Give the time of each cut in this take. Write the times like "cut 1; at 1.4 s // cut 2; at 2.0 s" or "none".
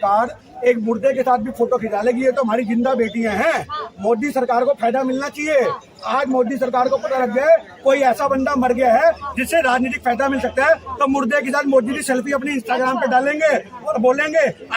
none